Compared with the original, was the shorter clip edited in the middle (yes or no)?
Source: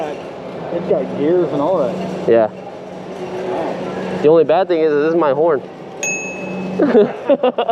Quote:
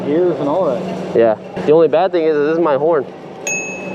yes